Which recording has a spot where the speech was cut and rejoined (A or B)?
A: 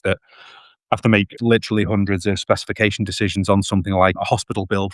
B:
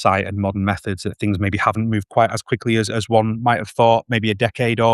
A